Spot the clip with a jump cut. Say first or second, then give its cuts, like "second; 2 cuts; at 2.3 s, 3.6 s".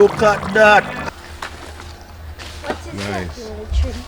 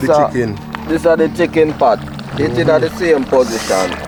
first; 1 cut; at 1.0 s